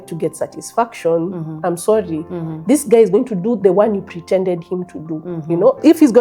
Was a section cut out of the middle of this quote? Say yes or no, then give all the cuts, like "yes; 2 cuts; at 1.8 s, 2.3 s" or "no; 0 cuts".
no; 0 cuts